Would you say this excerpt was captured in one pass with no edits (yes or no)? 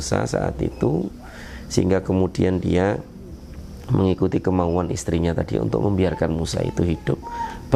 yes